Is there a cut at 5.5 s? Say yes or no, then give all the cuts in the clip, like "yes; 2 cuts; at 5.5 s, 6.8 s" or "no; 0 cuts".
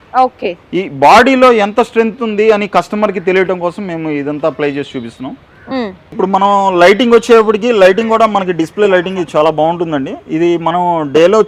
no; 0 cuts